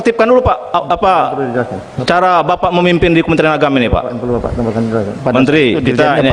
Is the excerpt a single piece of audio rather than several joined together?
no; 1 cut; at 5.1 s

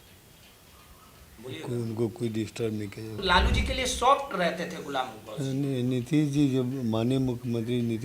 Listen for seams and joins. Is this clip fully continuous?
no; 1 cut; at 3.2 s

